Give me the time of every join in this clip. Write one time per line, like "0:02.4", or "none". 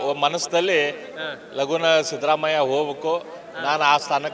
none